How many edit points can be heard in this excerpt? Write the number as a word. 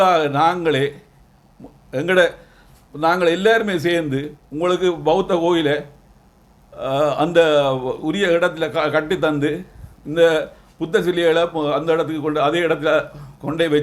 zero